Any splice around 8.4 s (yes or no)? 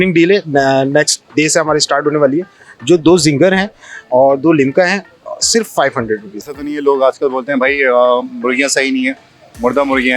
no